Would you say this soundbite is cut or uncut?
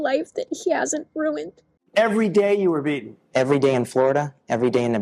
cut